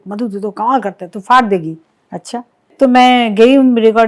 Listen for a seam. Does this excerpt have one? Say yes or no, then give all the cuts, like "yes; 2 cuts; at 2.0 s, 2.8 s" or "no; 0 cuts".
yes; 1 cut; at 2.6 s